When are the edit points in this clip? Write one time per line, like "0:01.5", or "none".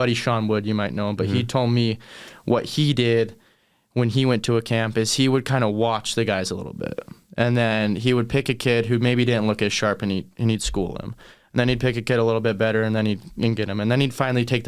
none